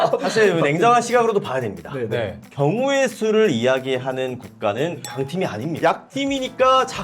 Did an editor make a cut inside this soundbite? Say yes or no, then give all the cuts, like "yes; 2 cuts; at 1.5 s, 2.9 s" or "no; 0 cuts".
yes; 1 cut; at 5.7 s